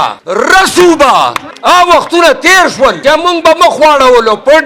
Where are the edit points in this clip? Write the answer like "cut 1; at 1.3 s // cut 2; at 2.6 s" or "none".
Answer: none